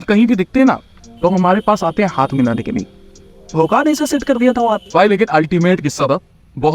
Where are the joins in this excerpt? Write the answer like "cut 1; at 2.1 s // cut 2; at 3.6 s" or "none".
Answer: none